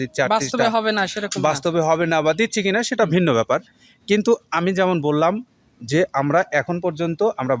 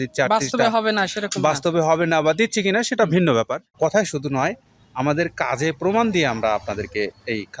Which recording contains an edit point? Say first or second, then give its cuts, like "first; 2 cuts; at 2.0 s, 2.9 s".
second; 1 cut; at 3.8 s